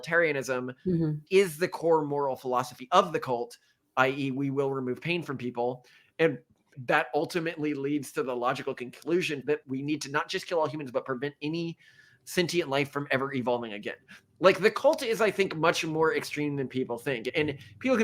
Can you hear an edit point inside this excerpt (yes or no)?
yes